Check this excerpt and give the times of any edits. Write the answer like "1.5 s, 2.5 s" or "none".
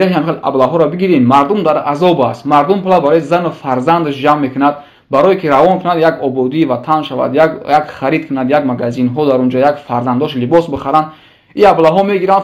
none